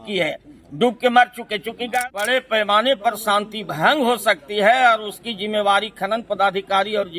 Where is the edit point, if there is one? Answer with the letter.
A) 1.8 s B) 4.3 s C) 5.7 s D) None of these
A